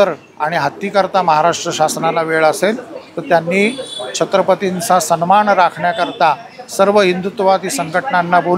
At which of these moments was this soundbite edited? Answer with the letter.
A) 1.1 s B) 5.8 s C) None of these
C